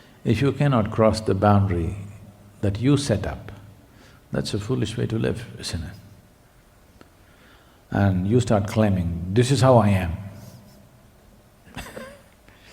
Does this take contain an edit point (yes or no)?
yes